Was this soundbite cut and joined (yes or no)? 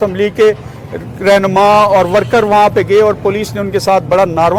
no